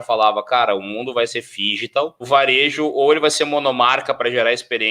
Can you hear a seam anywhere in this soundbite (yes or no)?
yes